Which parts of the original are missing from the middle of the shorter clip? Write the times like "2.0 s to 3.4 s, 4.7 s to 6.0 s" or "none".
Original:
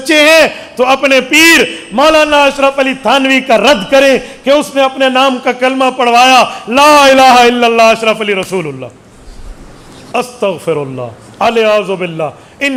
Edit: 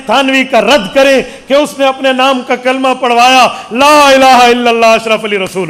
none